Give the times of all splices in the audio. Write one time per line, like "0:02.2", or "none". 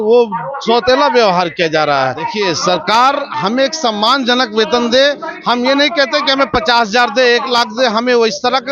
0:02.3